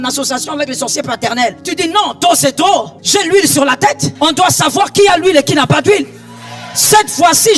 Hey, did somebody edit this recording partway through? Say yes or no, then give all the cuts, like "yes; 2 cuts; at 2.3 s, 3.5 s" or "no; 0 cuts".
yes; 3 cuts; at 1.6 s, 3.0 s, 4.1 s